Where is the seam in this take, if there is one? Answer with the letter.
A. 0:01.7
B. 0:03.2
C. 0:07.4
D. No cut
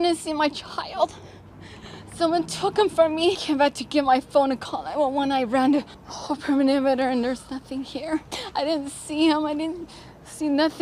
B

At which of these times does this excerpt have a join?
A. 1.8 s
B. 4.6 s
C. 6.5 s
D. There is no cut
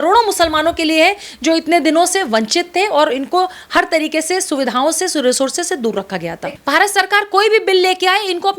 C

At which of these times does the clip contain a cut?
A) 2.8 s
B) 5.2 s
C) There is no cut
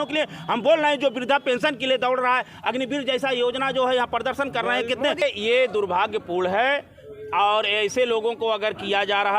B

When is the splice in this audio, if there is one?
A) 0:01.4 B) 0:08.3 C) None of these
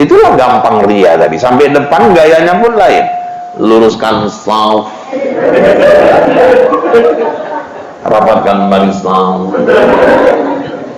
C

